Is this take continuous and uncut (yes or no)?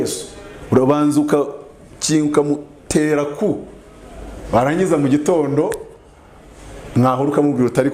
yes